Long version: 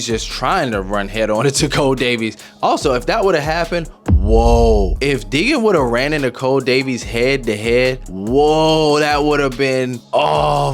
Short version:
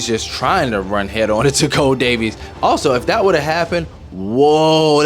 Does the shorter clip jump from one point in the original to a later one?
yes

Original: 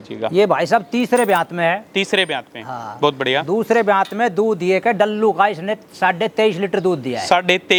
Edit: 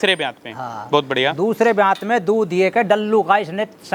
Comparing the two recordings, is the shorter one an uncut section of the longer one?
yes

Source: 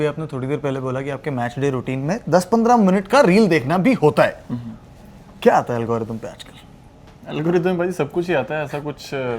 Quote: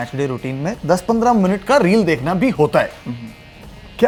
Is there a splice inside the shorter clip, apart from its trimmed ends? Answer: no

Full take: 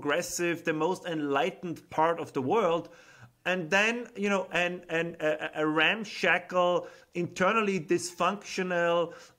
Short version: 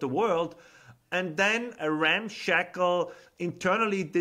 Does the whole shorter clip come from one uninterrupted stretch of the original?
no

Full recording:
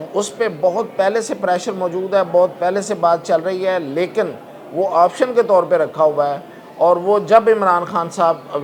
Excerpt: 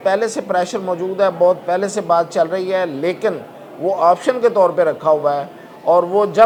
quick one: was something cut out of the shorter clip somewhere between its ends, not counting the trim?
no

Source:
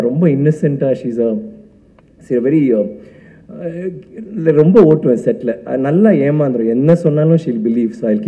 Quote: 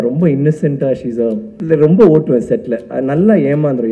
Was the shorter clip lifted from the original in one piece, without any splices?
no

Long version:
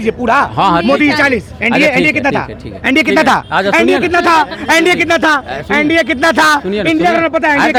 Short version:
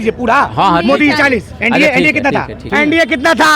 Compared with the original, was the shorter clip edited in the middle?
yes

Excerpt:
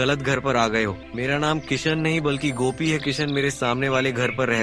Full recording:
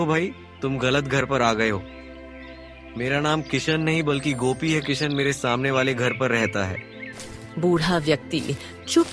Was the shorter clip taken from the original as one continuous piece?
no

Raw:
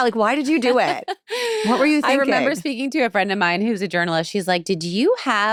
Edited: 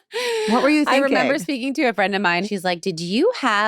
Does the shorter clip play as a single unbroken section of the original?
no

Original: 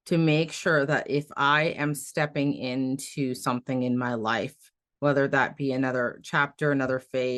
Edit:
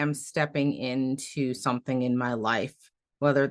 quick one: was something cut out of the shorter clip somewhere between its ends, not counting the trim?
no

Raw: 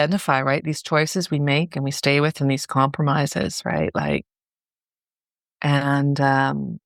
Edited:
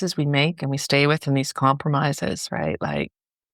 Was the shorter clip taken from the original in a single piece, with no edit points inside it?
yes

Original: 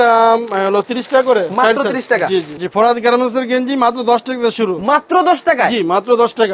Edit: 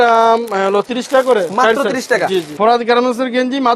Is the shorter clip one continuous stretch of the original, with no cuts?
no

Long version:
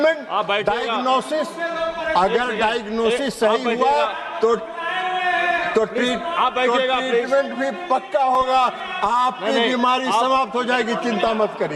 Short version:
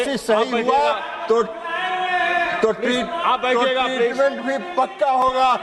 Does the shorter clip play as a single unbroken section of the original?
yes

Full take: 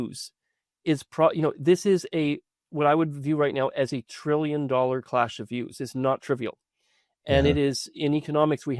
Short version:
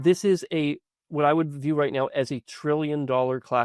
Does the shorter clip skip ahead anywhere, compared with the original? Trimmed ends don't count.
no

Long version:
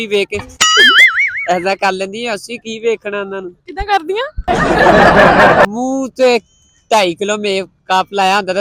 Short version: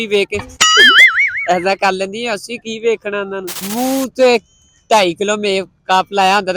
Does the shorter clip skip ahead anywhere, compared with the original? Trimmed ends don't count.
yes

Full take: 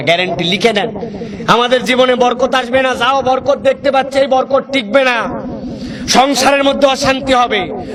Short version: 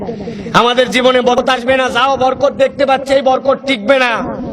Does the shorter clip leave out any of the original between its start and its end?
yes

